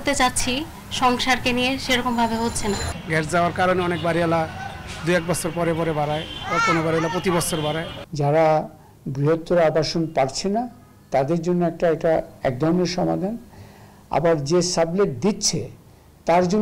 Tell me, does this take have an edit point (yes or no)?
yes